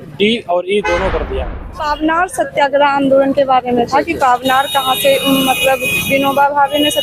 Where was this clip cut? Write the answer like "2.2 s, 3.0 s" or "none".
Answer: 1.3 s